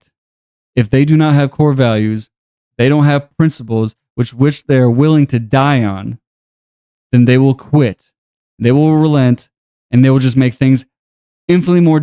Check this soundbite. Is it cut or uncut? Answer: uncut